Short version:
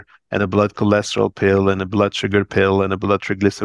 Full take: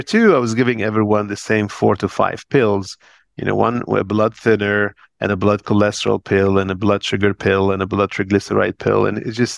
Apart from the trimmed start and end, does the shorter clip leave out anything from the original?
no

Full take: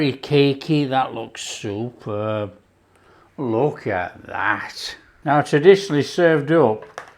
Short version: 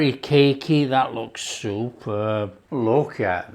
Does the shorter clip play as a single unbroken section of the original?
no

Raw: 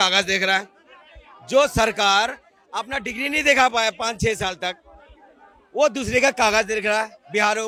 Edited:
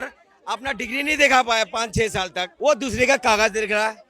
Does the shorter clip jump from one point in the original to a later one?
yes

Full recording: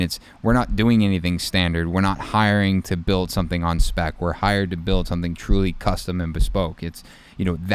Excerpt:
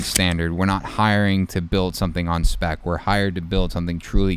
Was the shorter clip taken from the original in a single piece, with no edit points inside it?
yes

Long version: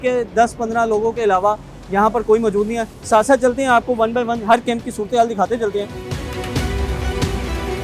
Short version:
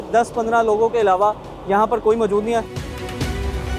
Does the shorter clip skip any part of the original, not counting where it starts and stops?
yes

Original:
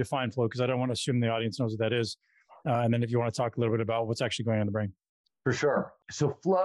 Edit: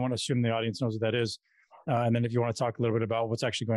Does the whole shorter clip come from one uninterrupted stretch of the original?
yes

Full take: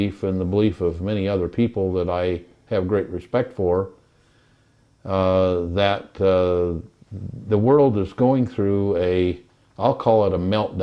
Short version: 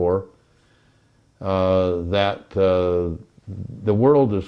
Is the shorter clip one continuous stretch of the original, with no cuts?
yes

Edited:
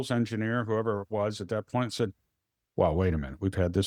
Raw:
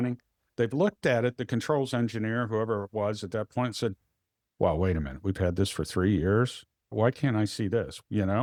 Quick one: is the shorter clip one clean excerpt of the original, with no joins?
yes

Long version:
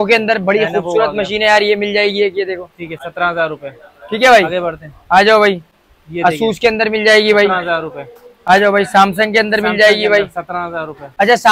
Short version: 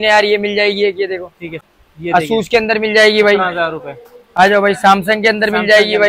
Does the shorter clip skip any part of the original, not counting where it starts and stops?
yes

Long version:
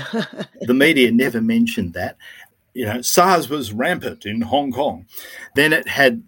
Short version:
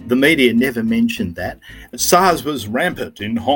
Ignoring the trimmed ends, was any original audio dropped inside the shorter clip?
yes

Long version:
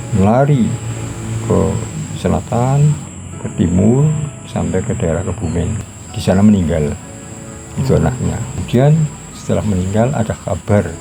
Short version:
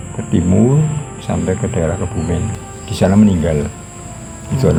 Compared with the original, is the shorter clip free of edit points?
yes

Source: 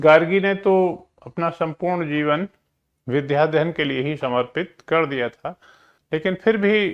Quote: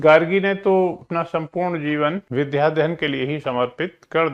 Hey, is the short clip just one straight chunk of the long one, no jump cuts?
no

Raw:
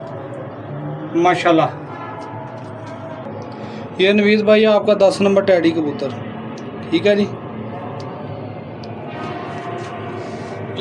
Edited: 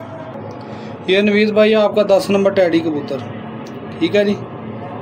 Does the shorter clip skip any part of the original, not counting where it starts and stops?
no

